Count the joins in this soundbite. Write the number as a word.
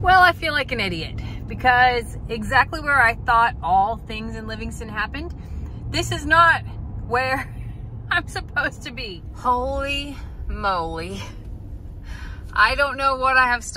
one